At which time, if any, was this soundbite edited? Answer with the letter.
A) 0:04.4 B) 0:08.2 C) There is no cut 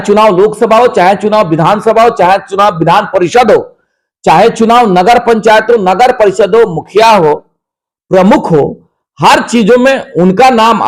C